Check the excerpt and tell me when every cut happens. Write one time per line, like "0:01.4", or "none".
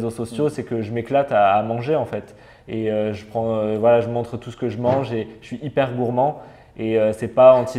none